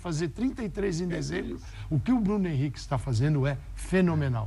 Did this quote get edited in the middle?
yes; 1 cut; at 1.7 s

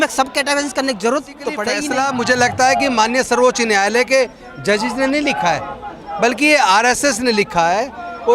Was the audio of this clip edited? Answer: yes; 1 cut; at 1.7 s

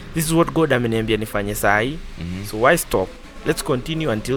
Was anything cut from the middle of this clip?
no; 0 cuts

